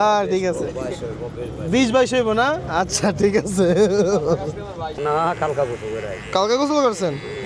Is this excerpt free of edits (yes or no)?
no